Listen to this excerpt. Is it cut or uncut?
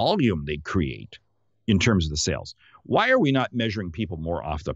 uncut